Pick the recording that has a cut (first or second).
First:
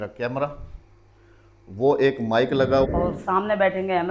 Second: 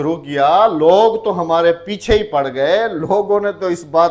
first